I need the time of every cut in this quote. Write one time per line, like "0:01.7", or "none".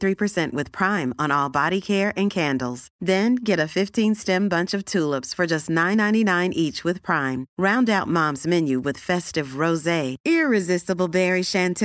none

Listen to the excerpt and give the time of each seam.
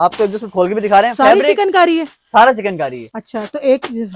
none

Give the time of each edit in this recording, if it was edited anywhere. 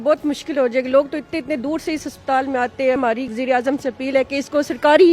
0:03.0

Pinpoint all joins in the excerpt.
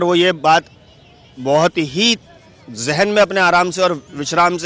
none

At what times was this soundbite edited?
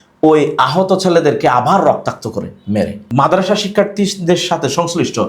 0:03.1

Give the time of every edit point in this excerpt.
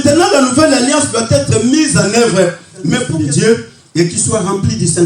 0:03.0

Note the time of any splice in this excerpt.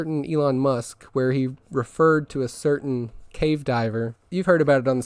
0:03.2
0:04.2

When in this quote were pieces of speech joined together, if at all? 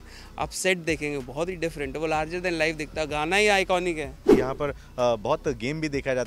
0:04.2

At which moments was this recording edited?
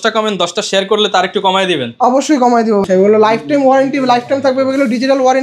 0:02.8

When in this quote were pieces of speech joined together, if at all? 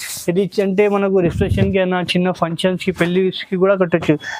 none

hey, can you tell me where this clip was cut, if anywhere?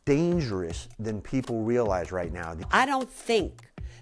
0:02.7

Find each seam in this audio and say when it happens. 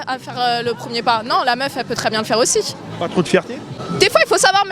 0:03.8

